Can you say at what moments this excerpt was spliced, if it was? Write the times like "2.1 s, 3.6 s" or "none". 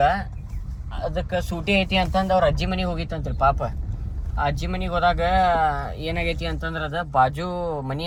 none